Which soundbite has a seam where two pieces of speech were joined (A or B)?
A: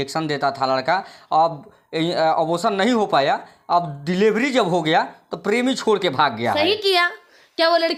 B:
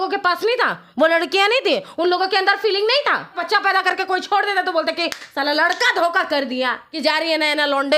B